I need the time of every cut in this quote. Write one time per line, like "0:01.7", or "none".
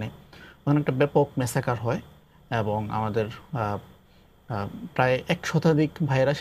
none